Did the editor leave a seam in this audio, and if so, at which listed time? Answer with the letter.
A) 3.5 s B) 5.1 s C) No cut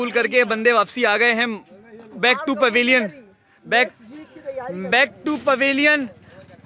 C